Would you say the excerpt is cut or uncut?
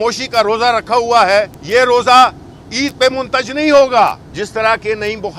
cut